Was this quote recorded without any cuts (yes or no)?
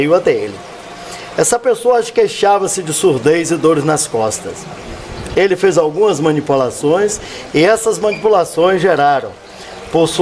yes